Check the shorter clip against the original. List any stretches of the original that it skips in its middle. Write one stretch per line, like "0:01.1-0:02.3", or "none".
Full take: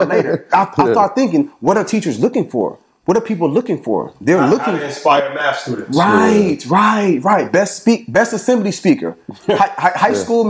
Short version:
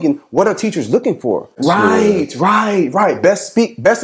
0:02.8-0:05.8

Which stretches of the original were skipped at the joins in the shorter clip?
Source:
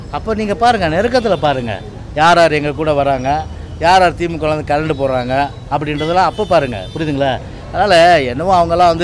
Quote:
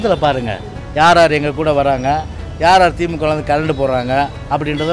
none

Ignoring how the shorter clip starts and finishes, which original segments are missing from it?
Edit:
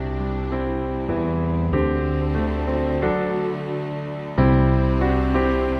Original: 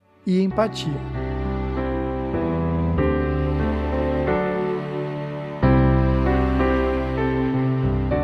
none

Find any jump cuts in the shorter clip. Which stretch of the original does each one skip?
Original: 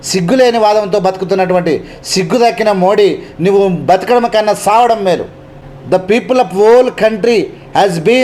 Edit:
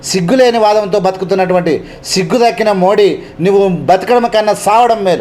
none

